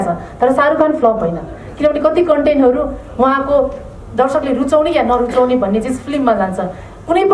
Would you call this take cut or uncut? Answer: uncut